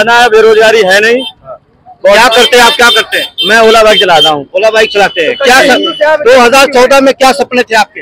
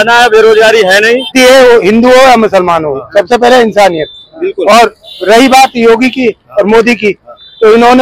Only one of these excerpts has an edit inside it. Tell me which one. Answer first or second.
second